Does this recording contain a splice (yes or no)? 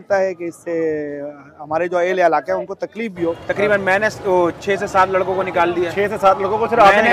yes